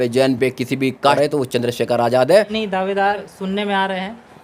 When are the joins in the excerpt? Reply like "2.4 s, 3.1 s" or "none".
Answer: 1.2 s, 3.1 s

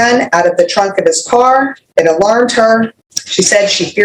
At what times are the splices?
1.8 s, 3.0 s

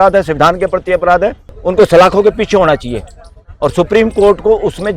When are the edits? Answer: 1.5 s

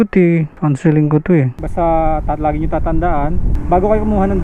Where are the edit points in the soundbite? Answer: 1.5 s

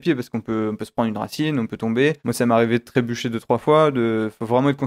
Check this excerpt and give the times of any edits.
2.2 s

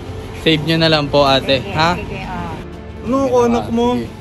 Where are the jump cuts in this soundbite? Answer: 2.5 s

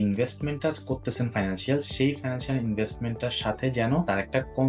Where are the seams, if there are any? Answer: none

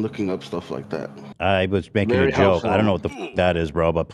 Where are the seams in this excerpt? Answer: 1.3 s

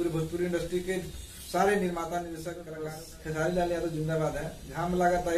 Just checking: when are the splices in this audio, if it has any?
2.6 s

